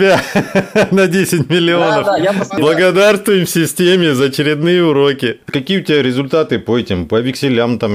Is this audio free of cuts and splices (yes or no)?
no